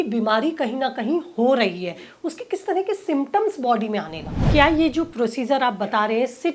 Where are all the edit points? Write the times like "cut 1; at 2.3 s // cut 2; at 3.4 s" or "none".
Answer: cut 1; at 4.4 s